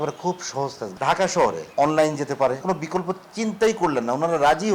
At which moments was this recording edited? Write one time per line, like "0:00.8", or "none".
0:00.8
0:01.6
0:02.6